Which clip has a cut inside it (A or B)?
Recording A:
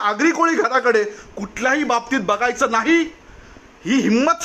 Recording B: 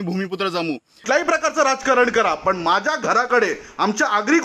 B